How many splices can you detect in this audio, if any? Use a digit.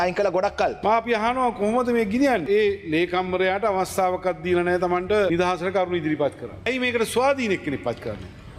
4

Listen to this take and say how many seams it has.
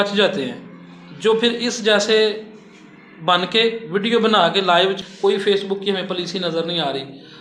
1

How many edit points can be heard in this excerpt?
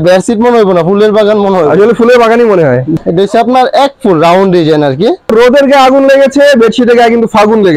2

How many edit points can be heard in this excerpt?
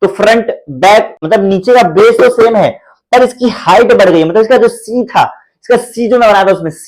1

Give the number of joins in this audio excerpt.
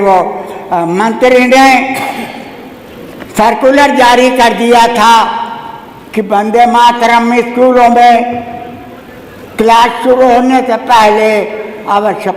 0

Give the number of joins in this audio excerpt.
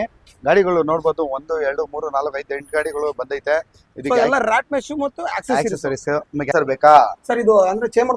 1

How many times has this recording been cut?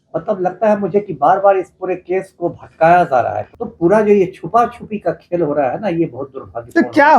1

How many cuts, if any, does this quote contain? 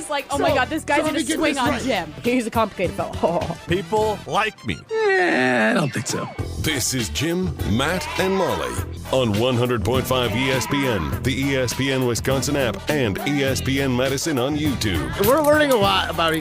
1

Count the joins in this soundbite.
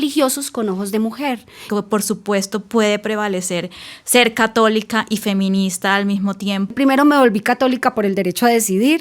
2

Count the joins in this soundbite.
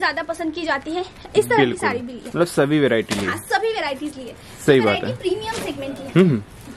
0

